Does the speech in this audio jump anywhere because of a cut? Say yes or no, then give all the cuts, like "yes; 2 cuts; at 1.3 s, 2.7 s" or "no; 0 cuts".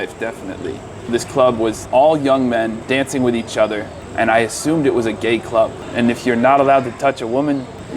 yes; 5 cuts; at 1.1 s, 1.8 s, 2.8 s, 4.0 s, 5.8 s